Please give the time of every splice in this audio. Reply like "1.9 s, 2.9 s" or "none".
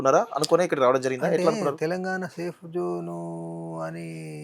none

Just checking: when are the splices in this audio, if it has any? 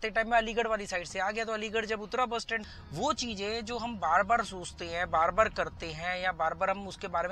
2.7 s

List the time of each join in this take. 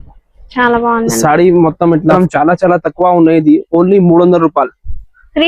2.1 s

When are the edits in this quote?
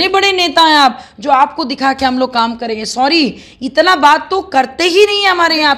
none

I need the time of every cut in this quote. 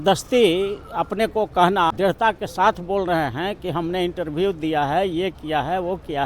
1.9 s

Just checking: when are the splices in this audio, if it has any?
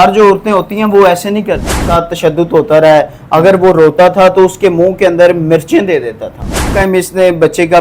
1.9 s, 6.7 s

